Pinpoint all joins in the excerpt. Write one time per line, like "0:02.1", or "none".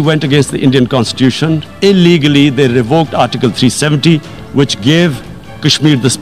none